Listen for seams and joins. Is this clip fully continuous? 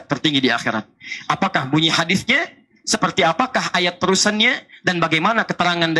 yes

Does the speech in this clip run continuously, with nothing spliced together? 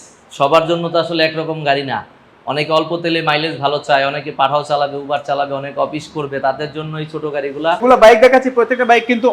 no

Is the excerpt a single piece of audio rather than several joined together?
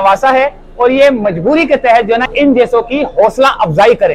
no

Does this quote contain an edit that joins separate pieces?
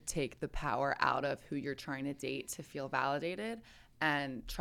no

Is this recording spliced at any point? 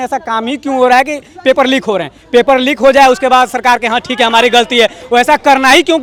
no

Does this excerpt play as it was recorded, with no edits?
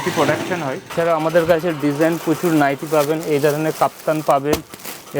no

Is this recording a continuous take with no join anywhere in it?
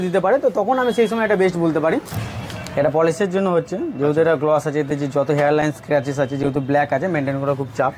no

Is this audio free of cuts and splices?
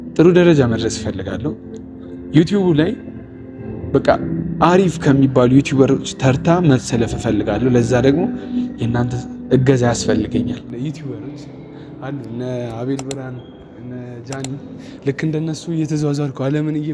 no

